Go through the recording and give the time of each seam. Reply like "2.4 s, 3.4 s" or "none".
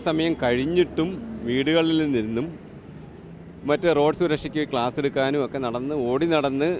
none

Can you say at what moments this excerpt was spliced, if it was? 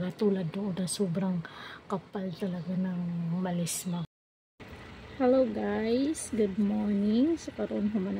4.1 s

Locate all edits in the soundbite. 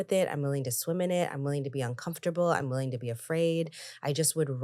none

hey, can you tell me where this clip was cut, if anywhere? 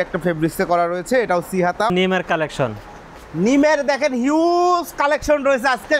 1.9 s

